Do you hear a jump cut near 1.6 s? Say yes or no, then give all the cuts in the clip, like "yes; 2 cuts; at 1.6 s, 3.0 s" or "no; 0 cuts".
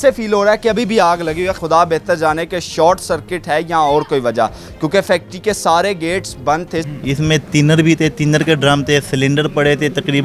yes; 2 cuts; at 1.6 s, 6.8 s